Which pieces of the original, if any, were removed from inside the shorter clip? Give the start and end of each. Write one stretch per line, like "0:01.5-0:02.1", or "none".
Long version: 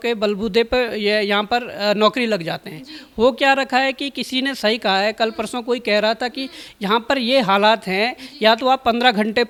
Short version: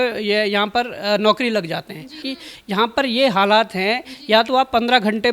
0:03.0-0:06.3

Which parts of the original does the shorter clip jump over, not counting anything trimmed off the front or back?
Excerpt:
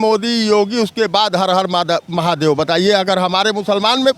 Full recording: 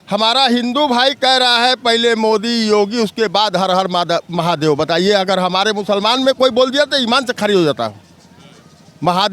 none

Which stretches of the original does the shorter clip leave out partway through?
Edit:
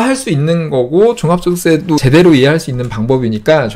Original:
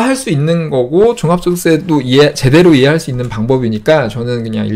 0:02.0-0:02.4

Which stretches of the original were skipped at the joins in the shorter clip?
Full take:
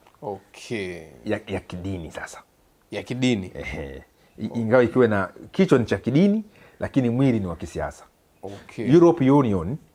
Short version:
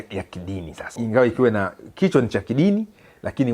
0:02.3-0:04.5

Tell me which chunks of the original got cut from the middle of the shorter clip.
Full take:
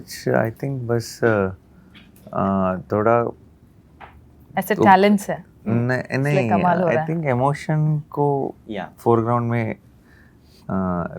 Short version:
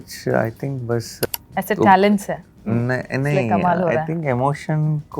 0:01.2-0:04.2

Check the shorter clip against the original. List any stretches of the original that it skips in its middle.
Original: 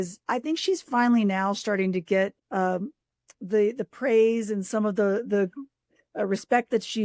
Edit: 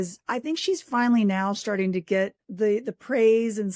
0:02.1-0:03.0

